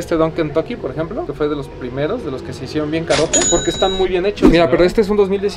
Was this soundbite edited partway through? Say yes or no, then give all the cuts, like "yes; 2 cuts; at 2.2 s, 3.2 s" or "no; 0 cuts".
no; 0 cuts